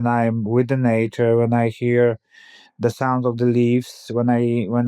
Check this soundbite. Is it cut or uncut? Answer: uncut